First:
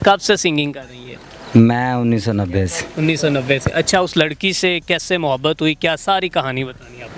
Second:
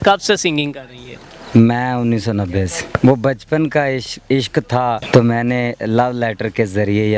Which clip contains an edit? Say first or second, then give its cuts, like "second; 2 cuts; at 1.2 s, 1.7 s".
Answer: second; 2 cuts; at 2.8 s, 5.0 s